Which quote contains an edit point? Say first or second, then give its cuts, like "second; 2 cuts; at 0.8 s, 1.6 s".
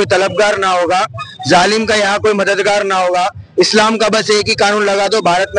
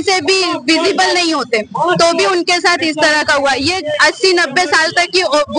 second; 1 cut; at 3.8 s